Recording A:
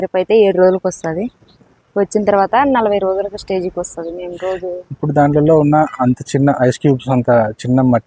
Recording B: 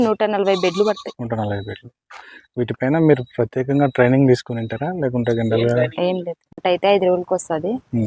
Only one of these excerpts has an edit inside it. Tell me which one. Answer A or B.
B